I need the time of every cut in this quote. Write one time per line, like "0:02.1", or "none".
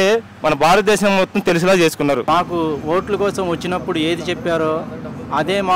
0:02.2